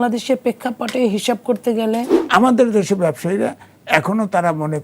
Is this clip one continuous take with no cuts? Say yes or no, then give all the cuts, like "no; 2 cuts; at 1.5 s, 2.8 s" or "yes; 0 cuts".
no; 1 cut; at 2.2 s